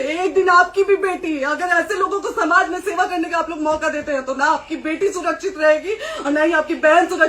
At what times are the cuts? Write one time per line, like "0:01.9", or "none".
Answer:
none